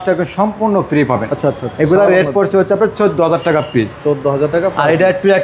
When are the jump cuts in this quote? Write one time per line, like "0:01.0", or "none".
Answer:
none